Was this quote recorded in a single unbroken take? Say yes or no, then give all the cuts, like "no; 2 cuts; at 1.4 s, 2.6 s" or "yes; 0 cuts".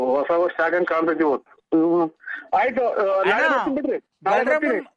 yes; 0 cuts